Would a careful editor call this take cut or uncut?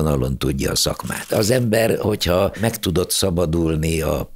cut